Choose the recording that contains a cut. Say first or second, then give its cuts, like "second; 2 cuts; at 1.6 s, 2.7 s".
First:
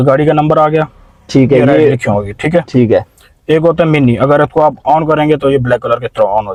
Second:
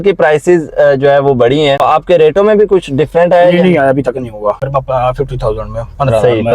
second; 2 cuts; at 1.8 s, 4.6 s